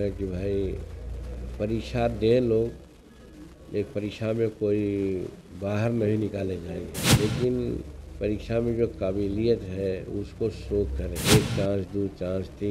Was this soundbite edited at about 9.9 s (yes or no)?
no